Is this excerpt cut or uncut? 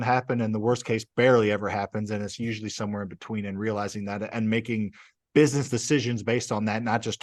uncut